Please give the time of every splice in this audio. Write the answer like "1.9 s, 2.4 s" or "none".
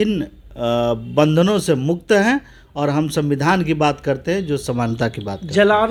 none